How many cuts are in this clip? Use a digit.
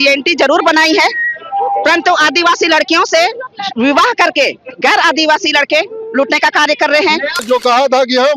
1